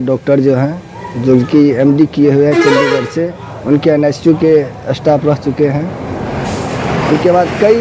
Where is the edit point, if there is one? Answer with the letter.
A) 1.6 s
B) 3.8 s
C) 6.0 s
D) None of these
D